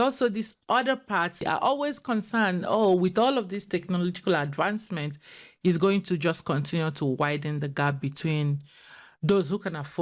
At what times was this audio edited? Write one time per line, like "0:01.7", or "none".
0:01.4